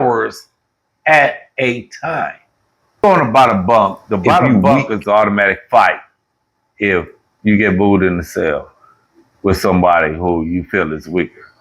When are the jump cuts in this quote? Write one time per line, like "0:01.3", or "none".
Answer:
0:03.0